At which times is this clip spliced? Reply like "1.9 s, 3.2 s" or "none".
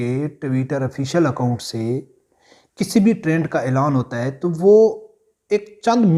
none

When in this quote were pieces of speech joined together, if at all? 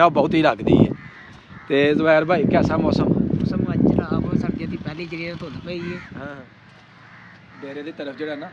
6.3 s

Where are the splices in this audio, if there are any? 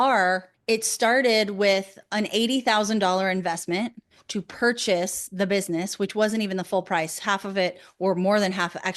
none

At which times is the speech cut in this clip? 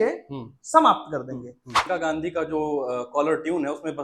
1.8 s

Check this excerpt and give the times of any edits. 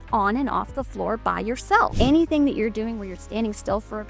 1.9 s

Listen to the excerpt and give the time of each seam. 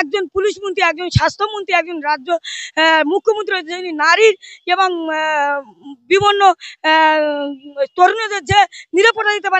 none

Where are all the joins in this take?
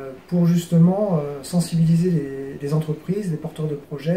none

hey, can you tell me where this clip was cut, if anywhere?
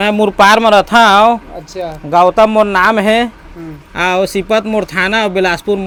none

